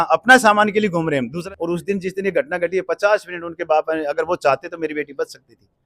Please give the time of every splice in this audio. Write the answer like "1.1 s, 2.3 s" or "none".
1.4 s